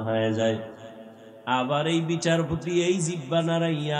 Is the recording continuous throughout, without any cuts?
yes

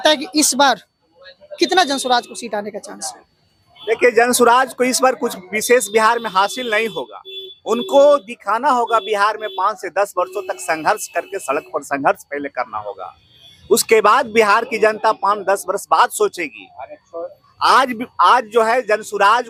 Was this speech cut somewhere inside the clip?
no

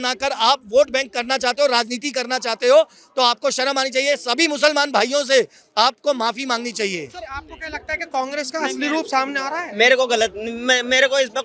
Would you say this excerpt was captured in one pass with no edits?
yes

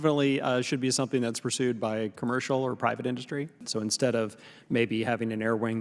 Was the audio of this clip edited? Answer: yes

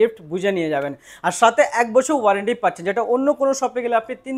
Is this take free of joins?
yes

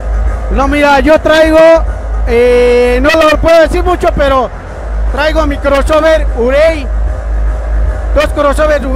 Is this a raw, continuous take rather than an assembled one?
yes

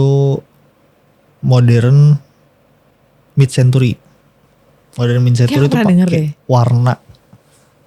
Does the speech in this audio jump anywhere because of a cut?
no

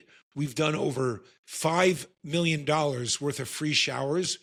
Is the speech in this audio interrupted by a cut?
no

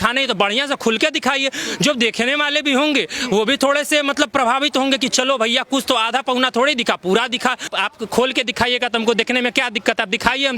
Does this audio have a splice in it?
yes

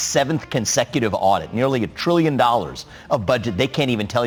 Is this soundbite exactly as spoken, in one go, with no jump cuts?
yes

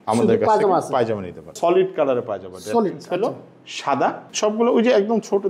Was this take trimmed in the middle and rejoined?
yes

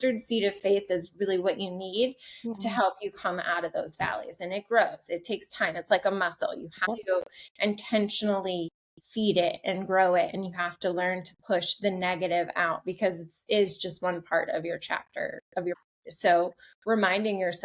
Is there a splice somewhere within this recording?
yes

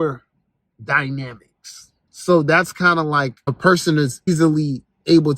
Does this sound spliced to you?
yes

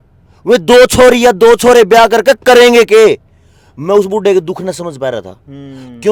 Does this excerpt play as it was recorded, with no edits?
yes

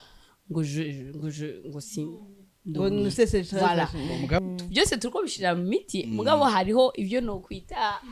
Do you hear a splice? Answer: yes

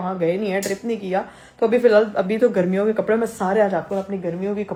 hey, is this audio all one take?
yes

